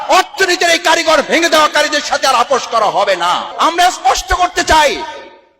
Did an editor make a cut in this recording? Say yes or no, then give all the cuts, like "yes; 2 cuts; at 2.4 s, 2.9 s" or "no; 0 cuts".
yes; 1 cut; at 3.5 s